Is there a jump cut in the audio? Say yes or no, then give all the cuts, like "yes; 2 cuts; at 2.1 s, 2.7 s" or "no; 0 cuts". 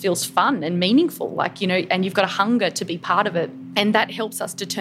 yes; 1 cut; at 3.9 s